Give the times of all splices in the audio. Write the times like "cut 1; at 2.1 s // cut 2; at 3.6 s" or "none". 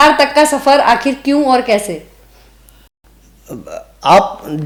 none